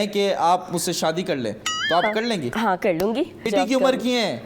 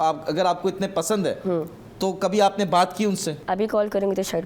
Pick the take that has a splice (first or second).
first